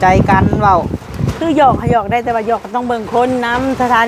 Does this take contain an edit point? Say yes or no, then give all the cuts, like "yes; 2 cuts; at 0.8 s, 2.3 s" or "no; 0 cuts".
no; 0 cuts